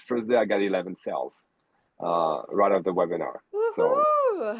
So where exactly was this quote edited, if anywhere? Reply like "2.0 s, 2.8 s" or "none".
none